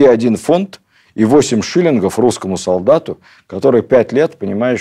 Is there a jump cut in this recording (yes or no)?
no